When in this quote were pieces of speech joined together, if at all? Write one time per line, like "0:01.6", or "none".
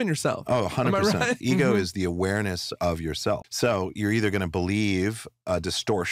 0:01.4
0:03.5